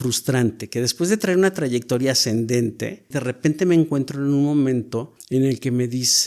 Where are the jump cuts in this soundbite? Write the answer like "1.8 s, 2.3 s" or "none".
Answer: 3.2 s, 5.1 s